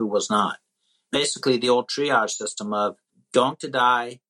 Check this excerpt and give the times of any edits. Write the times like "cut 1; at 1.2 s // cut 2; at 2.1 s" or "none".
cut 1; at 1.1 s // cut 2; at 3.1 s